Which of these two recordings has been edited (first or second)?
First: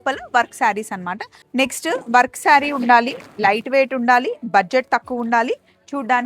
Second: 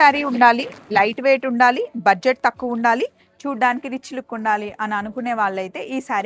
first